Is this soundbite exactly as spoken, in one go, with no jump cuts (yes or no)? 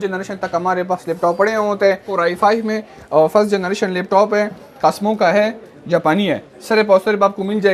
no